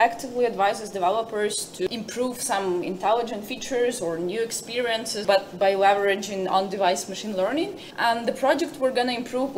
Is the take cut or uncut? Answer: cut